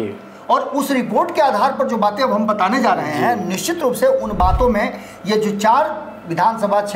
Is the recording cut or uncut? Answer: uncut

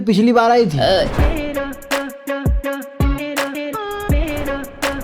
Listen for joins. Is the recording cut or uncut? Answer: cut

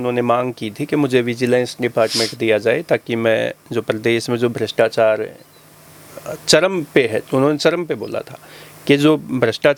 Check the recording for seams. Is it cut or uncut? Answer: uncut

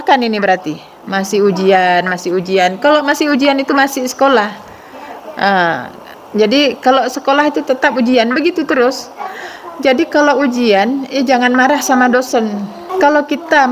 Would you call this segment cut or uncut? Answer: cut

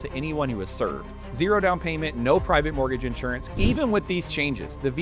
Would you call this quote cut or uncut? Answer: cut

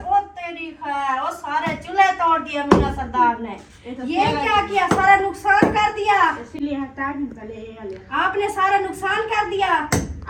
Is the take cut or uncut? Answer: uncut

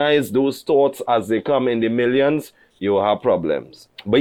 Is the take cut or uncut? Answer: uncut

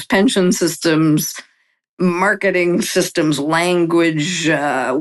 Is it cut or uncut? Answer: uncut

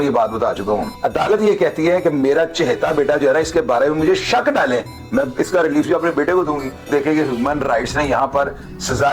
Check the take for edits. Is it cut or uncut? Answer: cut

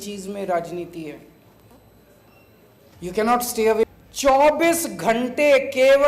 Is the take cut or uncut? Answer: cut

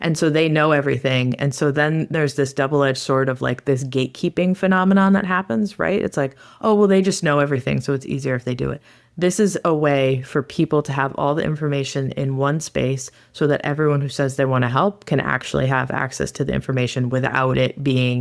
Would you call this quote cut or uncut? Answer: cut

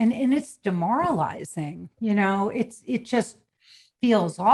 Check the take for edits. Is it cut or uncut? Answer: uncut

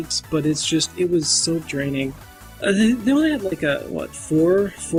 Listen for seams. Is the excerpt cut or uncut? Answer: uncut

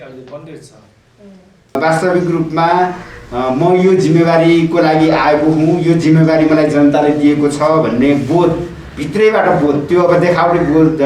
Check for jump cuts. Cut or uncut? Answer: cut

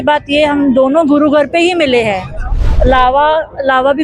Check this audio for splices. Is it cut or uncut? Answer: cut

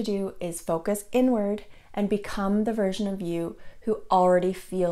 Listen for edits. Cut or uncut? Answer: uncut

